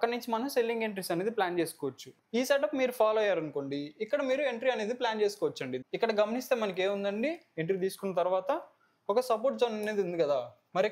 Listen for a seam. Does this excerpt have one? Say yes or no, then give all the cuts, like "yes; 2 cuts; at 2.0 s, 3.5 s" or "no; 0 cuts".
yes; 2 cuts; at 2.1 s, 5.7 s